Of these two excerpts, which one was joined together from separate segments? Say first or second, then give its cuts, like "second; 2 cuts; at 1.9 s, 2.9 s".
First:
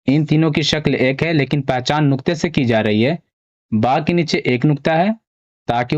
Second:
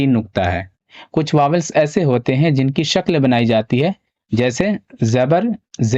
second; 1 cut; at 1.0 s